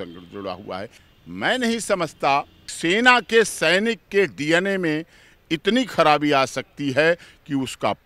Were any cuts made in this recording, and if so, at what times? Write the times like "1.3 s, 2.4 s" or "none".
1.0 s, 2.6 s